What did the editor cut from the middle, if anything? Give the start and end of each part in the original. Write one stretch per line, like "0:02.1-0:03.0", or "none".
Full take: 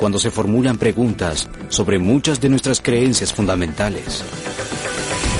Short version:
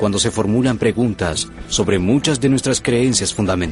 none